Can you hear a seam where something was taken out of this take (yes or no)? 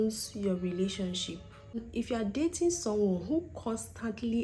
yes